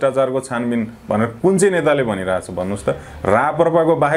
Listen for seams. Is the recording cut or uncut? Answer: uncut